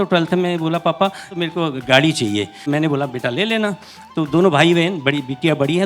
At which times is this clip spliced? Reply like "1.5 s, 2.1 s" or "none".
1.3 s, 2.7 s, 4.0 s